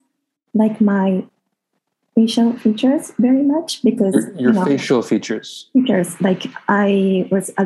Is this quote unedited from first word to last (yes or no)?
no